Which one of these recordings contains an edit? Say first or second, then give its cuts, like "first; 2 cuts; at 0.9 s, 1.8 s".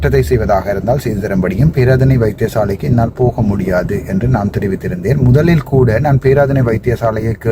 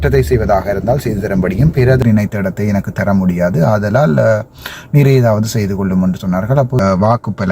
second; 2 cuts; at 2.0 s, 6.8 s